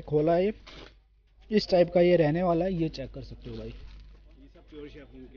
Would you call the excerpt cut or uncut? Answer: uncut